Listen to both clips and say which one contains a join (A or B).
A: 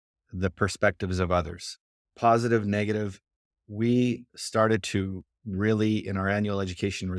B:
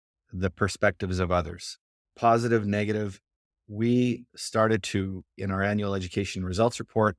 B